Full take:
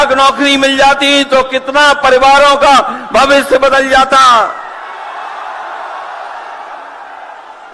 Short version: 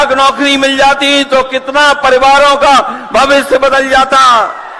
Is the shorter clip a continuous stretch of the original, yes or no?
yes